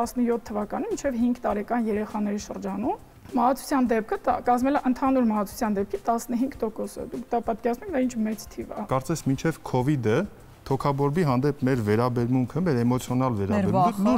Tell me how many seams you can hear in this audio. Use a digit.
0